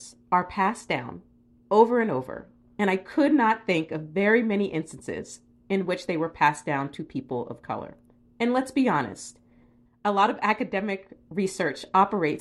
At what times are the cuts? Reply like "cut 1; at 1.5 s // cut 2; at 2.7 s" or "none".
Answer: none